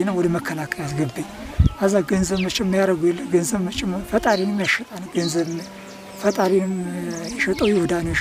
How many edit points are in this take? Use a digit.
0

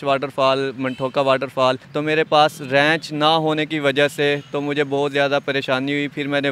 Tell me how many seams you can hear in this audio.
1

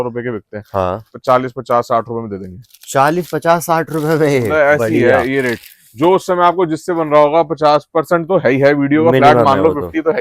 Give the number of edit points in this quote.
0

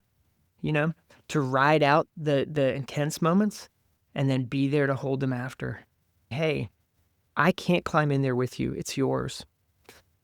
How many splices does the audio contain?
1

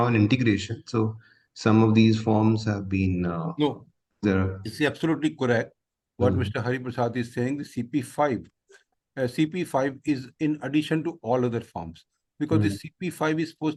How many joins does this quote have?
0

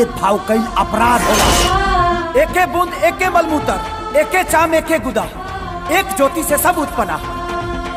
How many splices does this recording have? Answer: 1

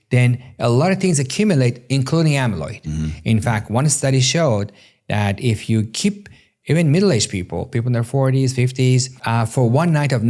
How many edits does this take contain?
1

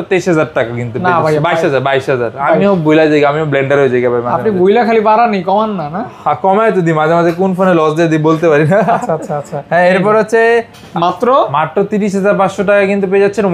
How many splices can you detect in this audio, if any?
1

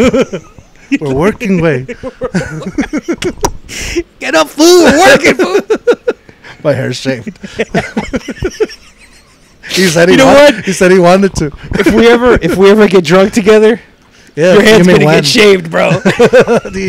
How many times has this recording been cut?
0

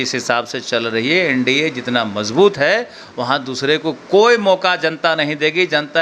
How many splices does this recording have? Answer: 0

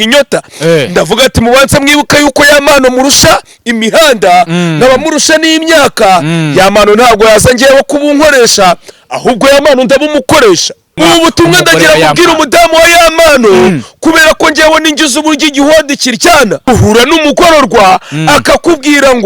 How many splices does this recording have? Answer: 2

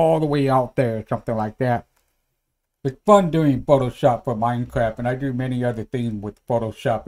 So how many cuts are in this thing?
1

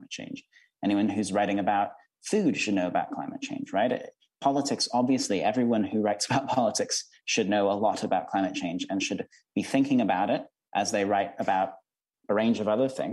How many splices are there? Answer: 1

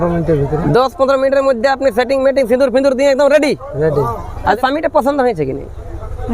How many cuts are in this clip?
1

